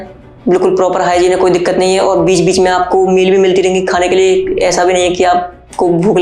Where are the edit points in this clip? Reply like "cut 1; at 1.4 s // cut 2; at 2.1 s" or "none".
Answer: none